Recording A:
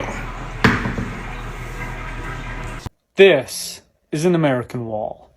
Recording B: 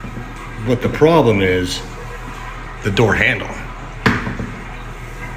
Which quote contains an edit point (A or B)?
A